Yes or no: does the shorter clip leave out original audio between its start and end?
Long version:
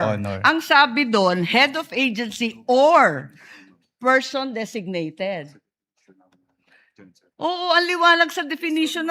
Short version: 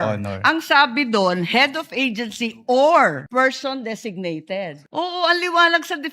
yes